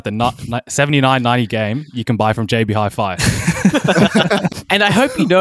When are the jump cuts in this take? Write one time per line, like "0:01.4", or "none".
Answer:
0:04.5